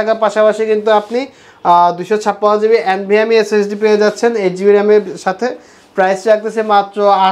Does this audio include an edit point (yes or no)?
no